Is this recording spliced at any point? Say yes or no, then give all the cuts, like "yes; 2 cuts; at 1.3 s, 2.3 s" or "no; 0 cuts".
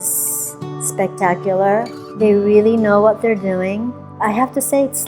yes; 2 cuts; at 2.0 s, 4.1 s